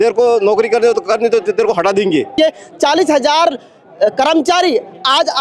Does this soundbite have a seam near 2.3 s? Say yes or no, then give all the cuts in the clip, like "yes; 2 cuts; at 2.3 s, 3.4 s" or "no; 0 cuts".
yes; 1 cut; at 2.3 s